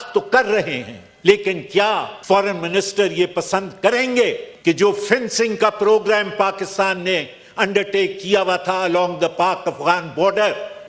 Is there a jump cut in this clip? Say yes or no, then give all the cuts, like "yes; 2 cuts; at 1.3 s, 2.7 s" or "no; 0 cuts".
yes; 1 cut; at 4.5 s